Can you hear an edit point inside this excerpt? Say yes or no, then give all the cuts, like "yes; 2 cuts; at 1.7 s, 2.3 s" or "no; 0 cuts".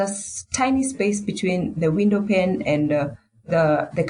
no; 0 cuts